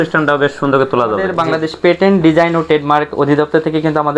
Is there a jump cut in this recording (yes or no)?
yes